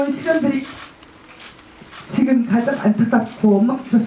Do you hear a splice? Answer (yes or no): no